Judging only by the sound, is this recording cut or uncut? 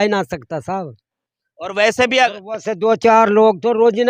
uncut